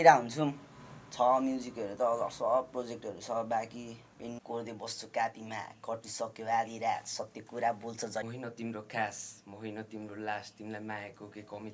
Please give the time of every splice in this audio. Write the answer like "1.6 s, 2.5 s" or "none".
4.4 s, 8.2 s